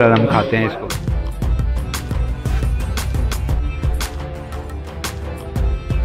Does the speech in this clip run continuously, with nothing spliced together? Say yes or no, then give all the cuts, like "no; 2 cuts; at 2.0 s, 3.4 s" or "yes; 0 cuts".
yes; 0 cuts